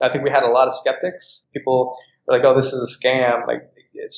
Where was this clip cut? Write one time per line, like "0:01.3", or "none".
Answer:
none